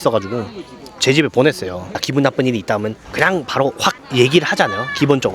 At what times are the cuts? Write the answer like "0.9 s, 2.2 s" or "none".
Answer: 2.0 s, 3.0 s, 4.0 s